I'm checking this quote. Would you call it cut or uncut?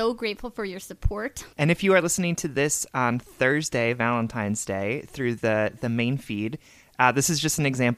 cut